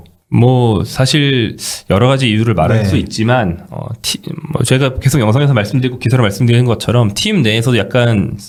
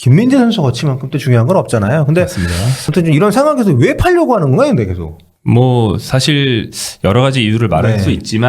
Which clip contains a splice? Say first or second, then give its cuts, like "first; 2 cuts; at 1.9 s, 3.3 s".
second; 1 cut; at 2.7 s